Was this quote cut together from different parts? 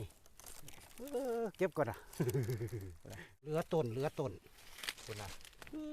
yes; 1 cut; at 3.4 s

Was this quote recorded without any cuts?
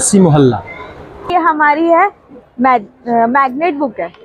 no; 1 cut; at 1.3 s

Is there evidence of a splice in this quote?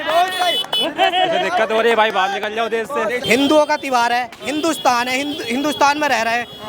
yes; 1 cut; at 3.2 s

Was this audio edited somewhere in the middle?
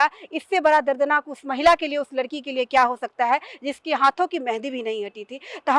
no; 0 cuts

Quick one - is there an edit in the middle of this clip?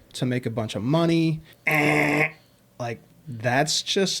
yes; 1 cut; at 1.5 s

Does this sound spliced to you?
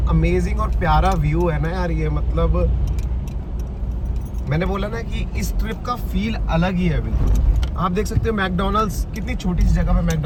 no; 0 cuts

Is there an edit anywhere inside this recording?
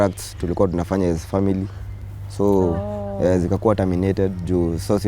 no; 0 cuts

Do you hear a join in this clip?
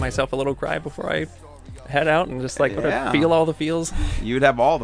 no; 0 cuts

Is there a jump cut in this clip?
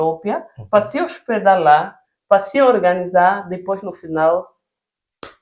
no; 0 cuts

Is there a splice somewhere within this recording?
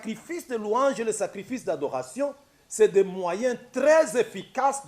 no; 0 cuts

